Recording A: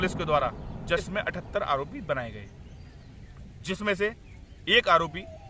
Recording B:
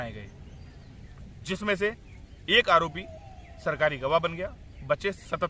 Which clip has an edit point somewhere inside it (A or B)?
A